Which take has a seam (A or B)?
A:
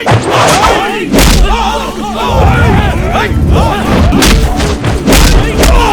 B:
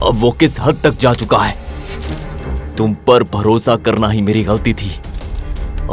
A